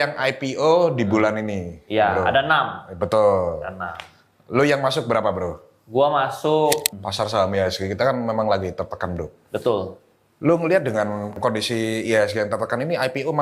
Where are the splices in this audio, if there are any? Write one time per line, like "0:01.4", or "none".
0:06.9
0:11.4